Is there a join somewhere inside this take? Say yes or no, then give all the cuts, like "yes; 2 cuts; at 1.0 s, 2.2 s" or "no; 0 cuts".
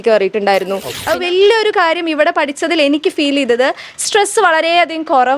yes; 1 cut; at 0.9 s